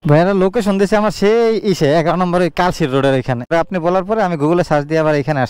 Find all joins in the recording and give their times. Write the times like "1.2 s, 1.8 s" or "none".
3.5 s